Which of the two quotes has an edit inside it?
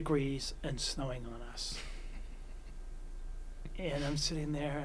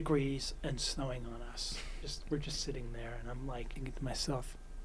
second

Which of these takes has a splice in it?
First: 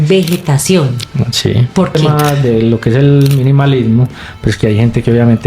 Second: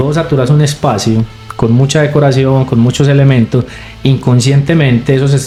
first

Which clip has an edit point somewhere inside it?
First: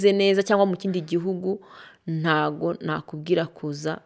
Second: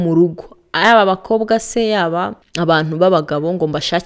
second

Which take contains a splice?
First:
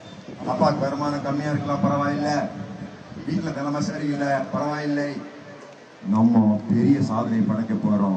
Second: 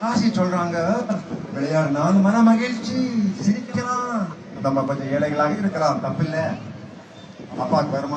second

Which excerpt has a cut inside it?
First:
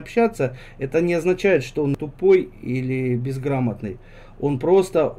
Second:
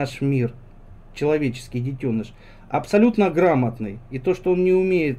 first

